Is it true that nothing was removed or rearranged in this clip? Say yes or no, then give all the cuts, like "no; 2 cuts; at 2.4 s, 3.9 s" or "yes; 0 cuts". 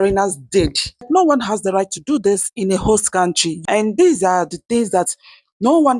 no; 2 cuts; at 1.0 s, 3.5 s